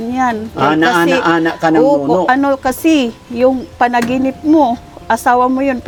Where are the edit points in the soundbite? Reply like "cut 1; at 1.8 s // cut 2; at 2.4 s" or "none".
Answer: none